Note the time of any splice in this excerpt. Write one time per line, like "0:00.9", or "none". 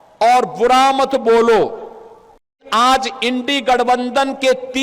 0:02.6